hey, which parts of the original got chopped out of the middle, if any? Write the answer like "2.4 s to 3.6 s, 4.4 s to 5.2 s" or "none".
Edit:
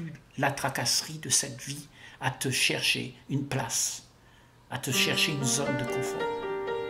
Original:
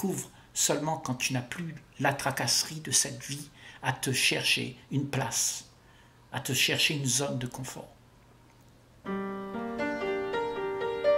7.3 s to 9.8 s